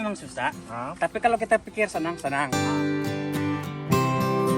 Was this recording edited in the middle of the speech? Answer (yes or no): yes